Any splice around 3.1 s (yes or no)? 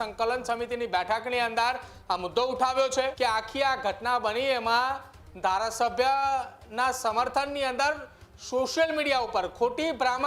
yes